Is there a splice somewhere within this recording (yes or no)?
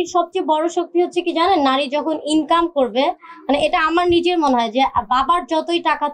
no